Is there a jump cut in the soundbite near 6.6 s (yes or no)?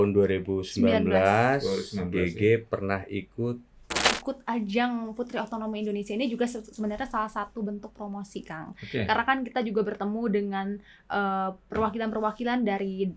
no